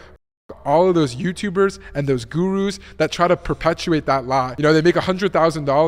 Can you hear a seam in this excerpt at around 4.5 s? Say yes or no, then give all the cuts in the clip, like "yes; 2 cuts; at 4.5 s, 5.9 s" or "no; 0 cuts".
yes; 1 cut; at 4.5 s